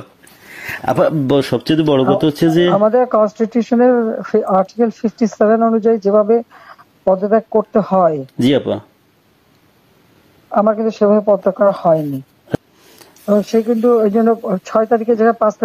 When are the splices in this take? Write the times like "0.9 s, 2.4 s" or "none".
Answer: 12.6 s

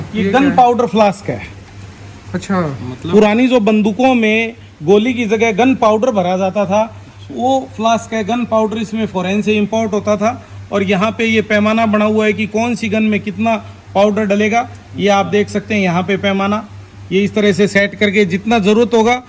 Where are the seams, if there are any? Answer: none

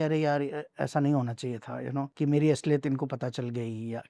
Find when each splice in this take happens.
2.1 s

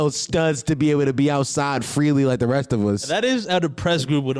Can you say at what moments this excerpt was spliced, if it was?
3.1 s

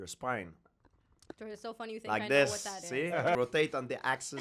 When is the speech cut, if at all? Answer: 3.4 s

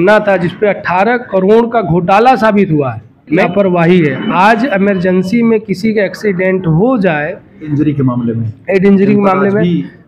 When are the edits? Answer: 3.4 s, 7.7 s

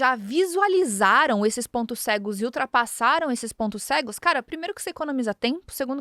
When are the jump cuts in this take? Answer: none

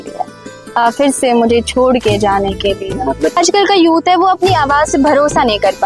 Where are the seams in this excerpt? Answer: 3.4 s

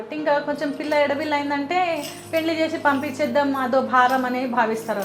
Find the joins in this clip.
none

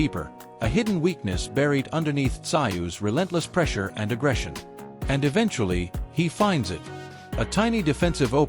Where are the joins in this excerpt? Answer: 6.3 s

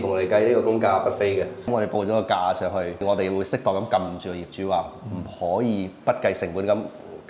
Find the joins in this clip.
1.7 s, 3.0 s

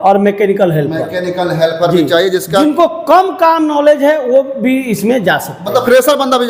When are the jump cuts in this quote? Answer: none

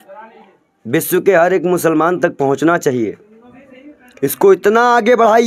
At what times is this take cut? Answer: none

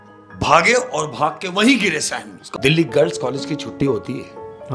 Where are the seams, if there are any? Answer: 2.5 s

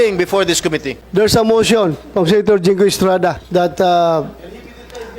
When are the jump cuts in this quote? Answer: 1.0 s, 3.4 s

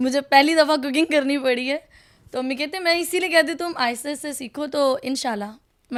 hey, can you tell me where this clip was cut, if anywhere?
none

